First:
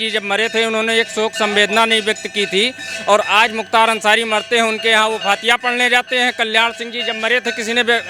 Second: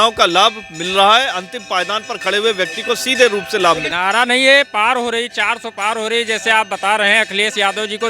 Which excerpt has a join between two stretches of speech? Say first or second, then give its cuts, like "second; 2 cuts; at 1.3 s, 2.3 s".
second; 1 cut; at 3.9 s